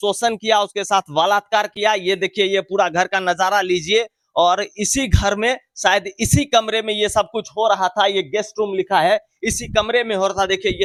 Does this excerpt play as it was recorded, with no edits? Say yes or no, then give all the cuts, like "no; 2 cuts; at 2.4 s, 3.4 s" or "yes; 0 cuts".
yes; 0 cuts